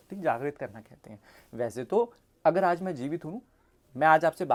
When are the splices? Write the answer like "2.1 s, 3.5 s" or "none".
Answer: none